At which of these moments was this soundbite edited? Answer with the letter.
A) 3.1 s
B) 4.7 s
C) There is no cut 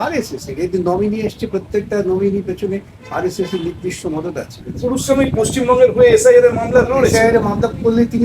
B